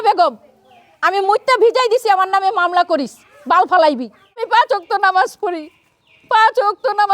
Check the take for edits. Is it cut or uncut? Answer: cut